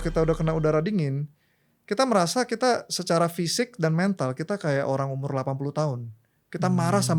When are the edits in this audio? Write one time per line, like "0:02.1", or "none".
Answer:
none